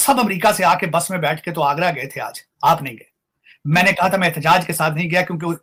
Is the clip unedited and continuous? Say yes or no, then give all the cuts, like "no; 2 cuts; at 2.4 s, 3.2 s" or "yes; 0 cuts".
yes; 0 cuts